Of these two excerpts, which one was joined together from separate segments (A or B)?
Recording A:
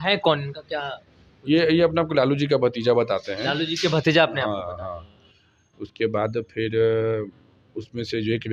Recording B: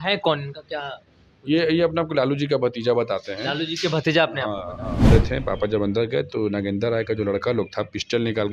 B